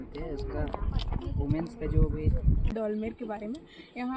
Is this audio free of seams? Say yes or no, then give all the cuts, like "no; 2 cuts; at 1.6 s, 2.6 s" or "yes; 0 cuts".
no; 1 cut; at 2.7 s